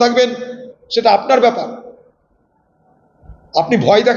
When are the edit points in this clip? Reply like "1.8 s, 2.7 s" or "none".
none